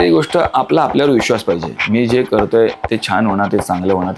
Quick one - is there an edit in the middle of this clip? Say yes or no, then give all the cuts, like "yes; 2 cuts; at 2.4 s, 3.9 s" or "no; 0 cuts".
no; 0 cuts